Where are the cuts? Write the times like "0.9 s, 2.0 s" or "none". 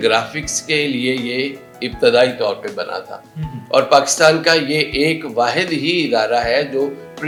none